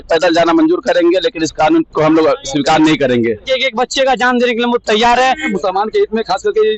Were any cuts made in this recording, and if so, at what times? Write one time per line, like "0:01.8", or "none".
0:03.4
0:05.5